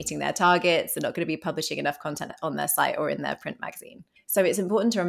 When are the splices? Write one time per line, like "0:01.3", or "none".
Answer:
0:02.3

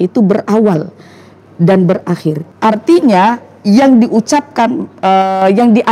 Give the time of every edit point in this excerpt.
0:02.5

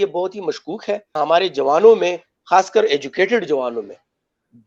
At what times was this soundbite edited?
0:01.2

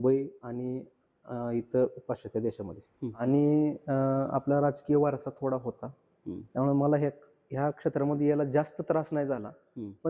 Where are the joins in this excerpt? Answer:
0:03.2

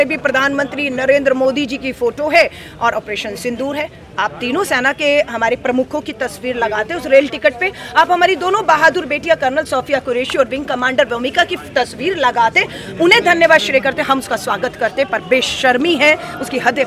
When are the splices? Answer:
none

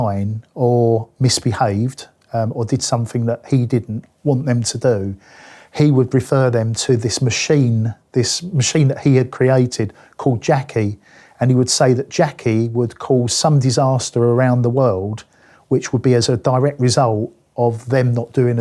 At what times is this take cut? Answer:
none

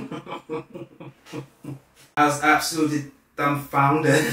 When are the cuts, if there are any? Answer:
0:01.9

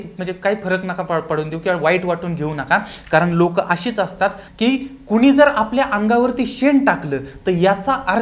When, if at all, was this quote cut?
0:04.4

